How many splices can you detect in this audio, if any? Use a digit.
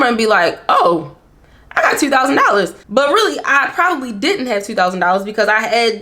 1